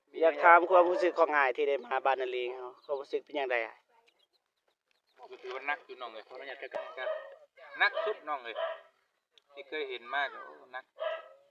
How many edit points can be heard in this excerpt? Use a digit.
1